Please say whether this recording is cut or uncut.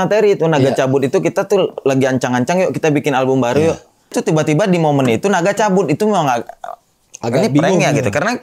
cut